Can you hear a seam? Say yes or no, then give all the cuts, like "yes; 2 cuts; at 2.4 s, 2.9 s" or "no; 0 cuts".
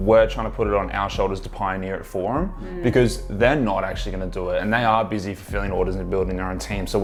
no; 0 cuts